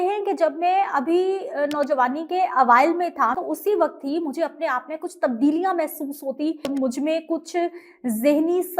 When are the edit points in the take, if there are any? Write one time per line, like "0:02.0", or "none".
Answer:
0:03.4
0:06.7